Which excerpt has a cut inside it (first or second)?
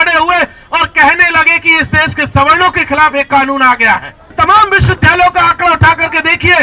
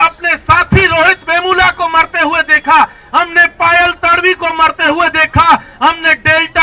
first